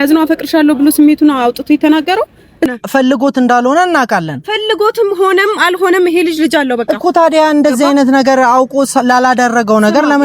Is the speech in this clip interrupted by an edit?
yes; 1 cut; at 2.7 s

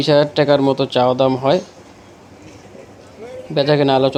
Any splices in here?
no; 0 cuts

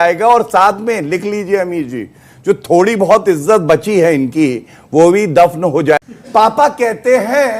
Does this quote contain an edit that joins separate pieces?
yes; 1 cut; at 6.0 s

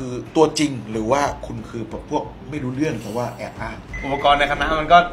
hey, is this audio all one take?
no; 1 cut; at 3.9 s

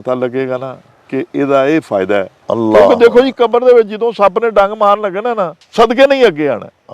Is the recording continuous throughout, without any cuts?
no; 1 cut; at 5.6 s

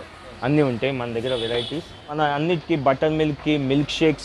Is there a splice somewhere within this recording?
yes; 1 cut; at 2.2 s

